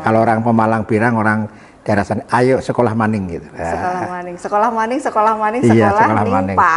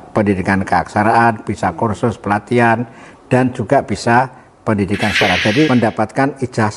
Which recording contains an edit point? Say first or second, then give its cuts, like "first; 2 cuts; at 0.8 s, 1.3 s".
second; 1 cut; at 5.7 s